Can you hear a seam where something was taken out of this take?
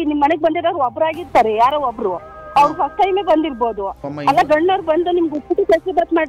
yes; 1 cut; at 4.0 s

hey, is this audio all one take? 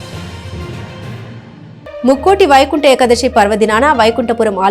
yes; 0 cuts

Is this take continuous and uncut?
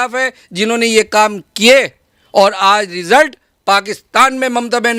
yes; 0 cuts

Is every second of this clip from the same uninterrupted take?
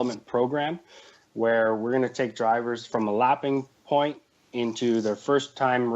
no; 1 cut; at 2.8 s

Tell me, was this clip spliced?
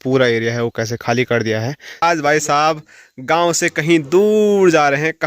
yes; 1 cut; at 2.0 s

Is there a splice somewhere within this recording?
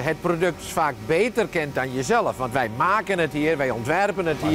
no; 0 cuts

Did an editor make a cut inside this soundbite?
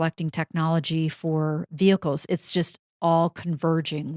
no; 0 cuts

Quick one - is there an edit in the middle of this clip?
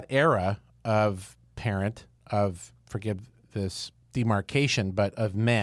no; 0 cuts

